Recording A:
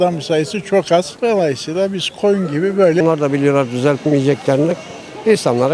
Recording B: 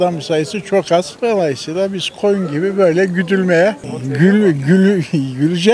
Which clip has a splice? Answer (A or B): A